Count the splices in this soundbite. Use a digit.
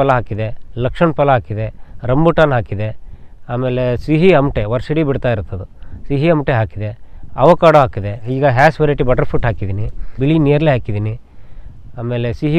2